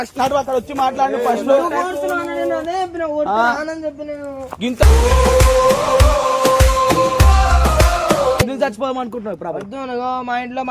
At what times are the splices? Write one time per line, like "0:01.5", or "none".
0:08.4